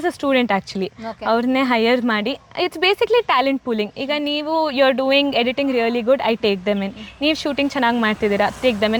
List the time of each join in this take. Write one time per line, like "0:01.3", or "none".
none